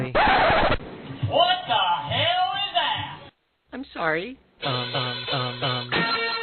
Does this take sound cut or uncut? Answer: uncut